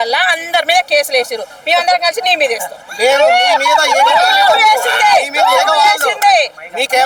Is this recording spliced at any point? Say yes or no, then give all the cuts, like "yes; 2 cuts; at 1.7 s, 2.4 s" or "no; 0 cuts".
no; 0 cuts